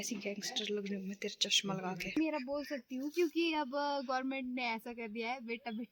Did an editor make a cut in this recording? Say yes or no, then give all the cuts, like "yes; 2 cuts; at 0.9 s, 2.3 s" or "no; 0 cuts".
yes; 1 cut; at 2.2 s